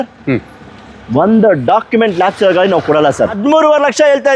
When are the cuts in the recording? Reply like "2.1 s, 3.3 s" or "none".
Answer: 3.3 s